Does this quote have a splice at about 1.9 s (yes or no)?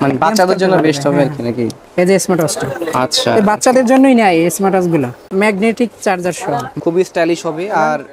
no